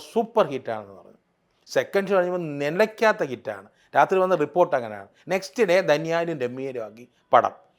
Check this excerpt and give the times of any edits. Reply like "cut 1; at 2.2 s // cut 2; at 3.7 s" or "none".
none